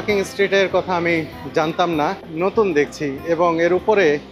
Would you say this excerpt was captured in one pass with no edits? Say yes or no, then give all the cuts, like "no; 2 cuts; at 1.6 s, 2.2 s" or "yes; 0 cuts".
no; 1 cut; at 2.2 s